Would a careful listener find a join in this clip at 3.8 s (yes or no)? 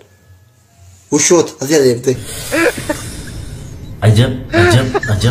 no